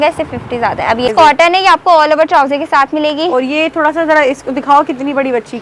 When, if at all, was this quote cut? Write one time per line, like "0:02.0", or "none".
0:01.1